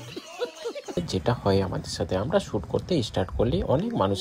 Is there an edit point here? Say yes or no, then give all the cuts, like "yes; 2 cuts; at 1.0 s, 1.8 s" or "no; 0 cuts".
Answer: yes; 1 cut; at 1.0 s